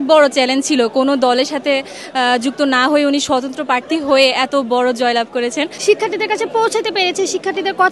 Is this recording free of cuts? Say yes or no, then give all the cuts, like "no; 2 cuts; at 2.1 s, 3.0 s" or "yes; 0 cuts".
no; 1 cut; at 5.7 s